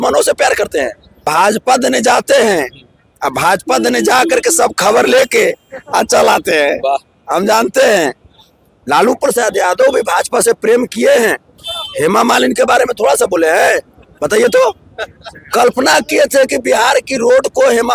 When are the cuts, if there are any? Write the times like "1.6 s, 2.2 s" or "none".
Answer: 1.2 s